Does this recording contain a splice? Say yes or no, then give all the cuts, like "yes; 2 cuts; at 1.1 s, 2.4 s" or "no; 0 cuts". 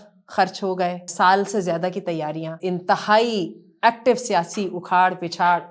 yes; 2 cuts; at 1.1 s, 2.6 s